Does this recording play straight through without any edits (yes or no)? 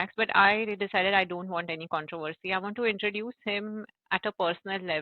yes